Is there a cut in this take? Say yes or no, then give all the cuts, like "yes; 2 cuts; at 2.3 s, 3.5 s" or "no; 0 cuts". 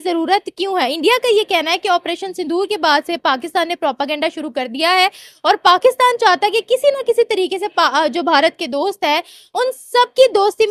no; 0 cuts